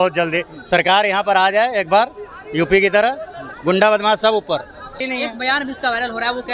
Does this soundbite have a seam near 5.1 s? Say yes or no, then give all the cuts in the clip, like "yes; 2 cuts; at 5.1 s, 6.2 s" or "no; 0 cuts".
yes; 1 cut; at 5.1 s